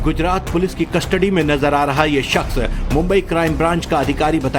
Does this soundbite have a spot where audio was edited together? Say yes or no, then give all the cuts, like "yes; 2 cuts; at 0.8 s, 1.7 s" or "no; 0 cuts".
no; 0 cuts